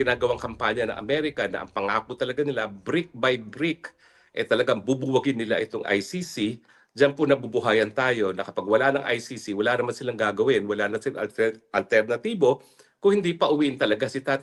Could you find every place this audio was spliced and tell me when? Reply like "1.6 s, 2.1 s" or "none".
none